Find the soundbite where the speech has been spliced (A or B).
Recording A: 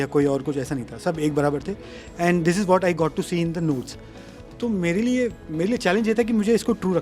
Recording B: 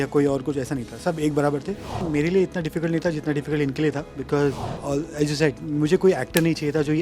B